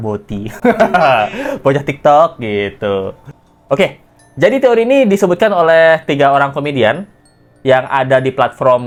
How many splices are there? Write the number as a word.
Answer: zero